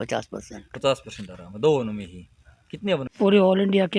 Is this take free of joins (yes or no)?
no